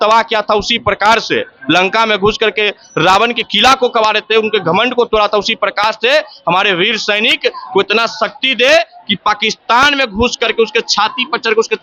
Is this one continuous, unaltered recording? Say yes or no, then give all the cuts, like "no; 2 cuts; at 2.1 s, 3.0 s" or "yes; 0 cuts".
yes; 0 cuts